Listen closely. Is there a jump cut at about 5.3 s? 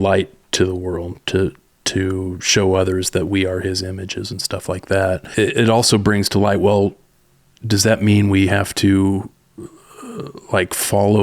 yes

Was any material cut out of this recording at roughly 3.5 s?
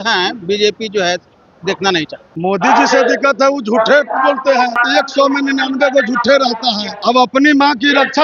no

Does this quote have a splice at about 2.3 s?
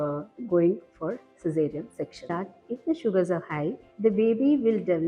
yes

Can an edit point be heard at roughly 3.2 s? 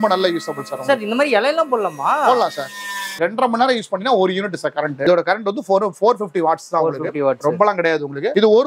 yes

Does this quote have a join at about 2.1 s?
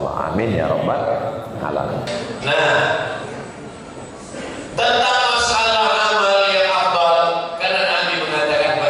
yes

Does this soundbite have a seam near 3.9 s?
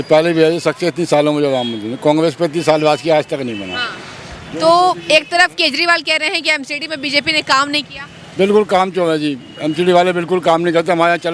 no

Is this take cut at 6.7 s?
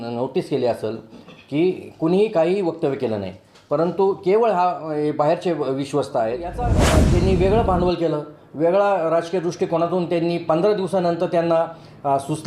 yes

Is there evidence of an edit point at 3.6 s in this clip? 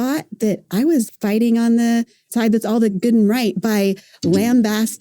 no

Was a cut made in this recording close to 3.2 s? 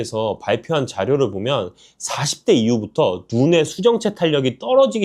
no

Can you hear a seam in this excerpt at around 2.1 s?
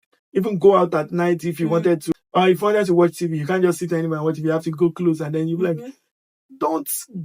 yes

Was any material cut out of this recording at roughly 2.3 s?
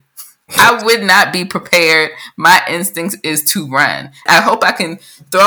no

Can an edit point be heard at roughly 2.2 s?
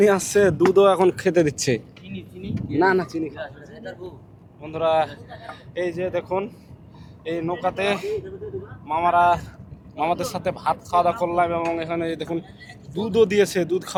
no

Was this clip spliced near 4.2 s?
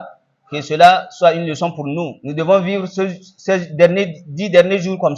no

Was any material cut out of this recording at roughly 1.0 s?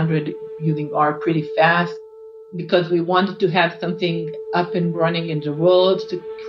no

